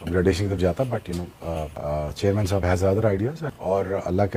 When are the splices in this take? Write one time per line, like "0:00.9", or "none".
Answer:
none